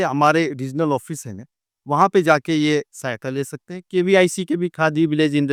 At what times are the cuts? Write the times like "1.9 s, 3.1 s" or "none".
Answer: none

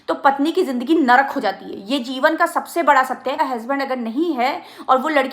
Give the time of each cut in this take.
3.4 s

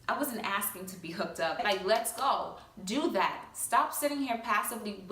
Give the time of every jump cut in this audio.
1.5 s

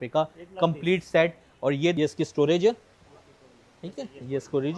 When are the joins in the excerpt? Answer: 1.9 s

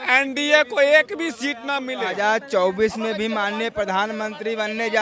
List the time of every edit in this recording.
2.1 s

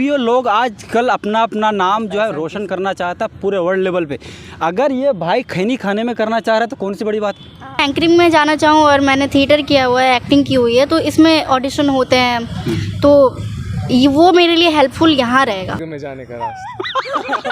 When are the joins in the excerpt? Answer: 7.8 s, 15.8 s

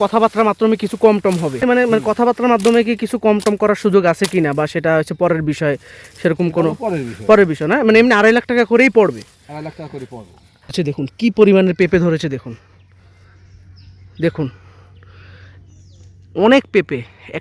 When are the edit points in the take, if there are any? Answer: 1.6 s, 10.7 s

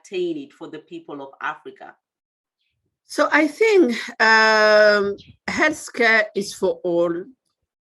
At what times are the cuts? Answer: none

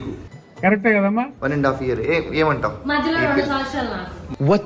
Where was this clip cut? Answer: none

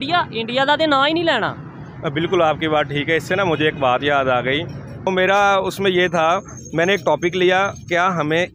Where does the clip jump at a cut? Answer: 5.1 s

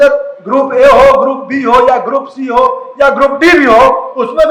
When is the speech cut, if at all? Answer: none

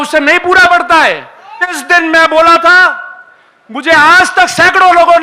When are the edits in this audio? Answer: 1.8 s

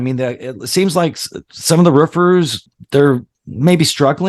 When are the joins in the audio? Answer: 2.7 s

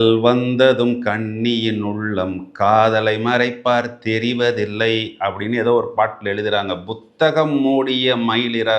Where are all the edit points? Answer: none

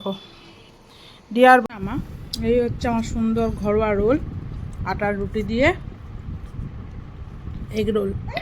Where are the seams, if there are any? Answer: 1.6 s

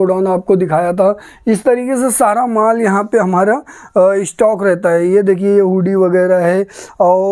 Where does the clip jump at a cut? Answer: none

